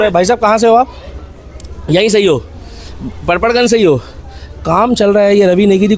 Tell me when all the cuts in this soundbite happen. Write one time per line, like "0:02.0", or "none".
none